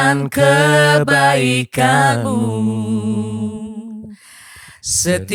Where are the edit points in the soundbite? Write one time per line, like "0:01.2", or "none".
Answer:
none